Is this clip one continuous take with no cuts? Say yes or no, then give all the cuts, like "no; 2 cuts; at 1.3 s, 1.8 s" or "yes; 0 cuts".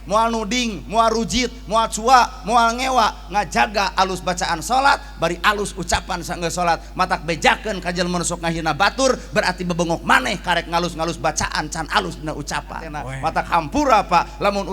no; 1 cut; at 13.0 s